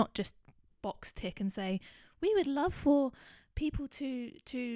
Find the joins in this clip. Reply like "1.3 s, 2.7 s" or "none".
none